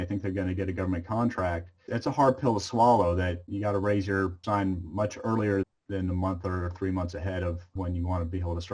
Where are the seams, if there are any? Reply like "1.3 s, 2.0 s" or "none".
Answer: 1.8 s, 3.5 s, 4.4 s, 5.6 s, 7.7 s